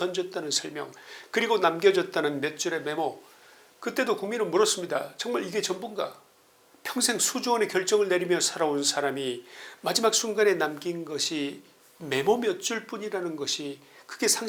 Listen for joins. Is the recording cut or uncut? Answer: uncut